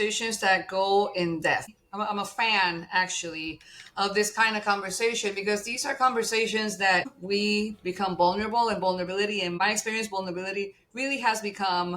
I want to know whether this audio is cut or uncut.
cut